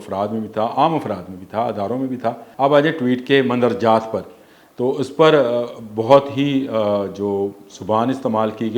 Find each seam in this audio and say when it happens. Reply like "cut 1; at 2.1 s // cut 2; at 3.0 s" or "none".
cut 1; at 2.4 s